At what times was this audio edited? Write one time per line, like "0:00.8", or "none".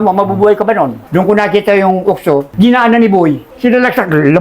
0:01.0
0:02.5
0:03.5